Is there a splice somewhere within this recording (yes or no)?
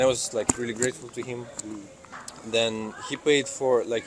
no